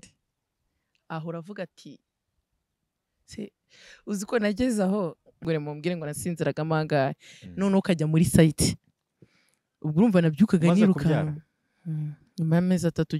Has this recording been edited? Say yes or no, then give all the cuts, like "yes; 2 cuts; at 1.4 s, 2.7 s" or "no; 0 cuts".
yes; 1 cut; at 5.4 s